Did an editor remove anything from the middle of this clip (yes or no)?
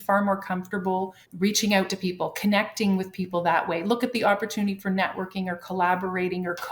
yes